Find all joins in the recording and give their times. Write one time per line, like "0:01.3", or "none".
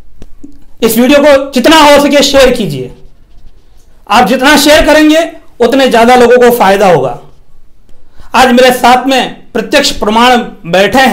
none